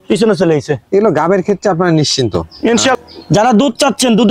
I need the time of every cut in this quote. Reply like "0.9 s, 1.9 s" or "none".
2.9 s